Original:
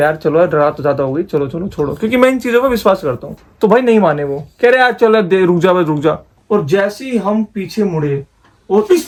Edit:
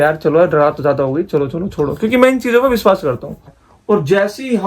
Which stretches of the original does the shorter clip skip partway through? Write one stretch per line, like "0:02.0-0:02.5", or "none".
0:03.6-0:06.2